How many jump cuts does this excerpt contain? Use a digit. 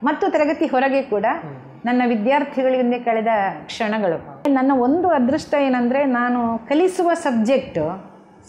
1